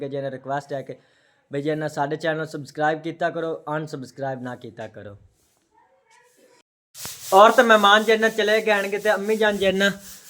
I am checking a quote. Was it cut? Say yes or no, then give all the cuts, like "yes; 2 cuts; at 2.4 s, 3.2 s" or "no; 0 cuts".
yes; 1 cut; at 6.6 s